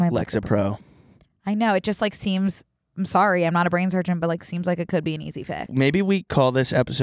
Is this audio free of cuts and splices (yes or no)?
no